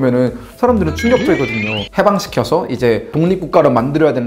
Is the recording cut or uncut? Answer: cut